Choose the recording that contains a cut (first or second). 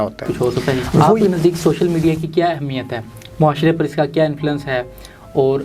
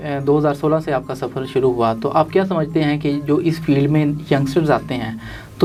first